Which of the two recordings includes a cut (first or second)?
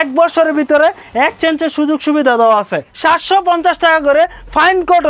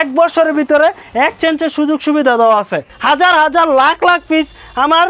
second